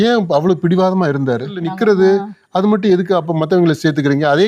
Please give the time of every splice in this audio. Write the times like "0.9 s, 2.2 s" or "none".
1.7 s